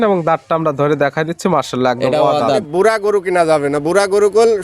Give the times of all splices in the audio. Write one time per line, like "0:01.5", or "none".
0:02.7